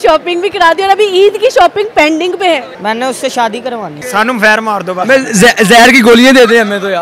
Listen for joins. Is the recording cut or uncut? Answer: cut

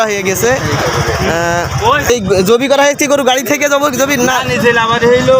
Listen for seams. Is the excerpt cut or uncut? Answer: cut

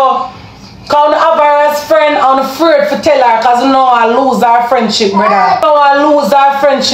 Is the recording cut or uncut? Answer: cut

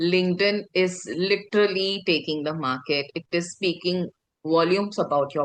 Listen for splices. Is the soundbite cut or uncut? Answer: uncut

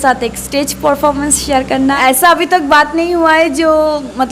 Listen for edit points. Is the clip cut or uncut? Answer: cut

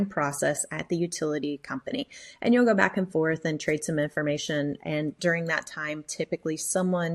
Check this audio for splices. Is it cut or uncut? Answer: uncut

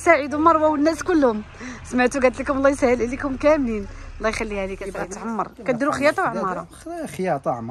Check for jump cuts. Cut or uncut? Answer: cut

